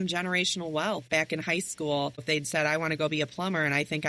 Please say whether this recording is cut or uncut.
cut